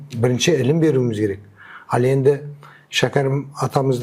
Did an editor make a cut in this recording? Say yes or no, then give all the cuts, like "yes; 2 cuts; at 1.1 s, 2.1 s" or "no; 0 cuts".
no; 0 cuts